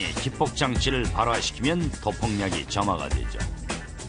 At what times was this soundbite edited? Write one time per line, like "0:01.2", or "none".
none